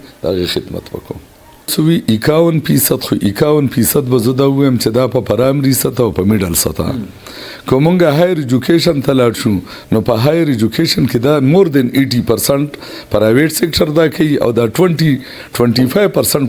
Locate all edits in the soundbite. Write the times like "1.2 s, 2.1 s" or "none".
1.7 s